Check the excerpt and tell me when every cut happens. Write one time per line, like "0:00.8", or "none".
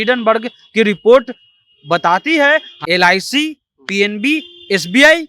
0:02.7